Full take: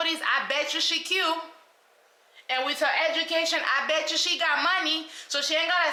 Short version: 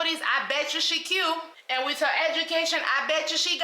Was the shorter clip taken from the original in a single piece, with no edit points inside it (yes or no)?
no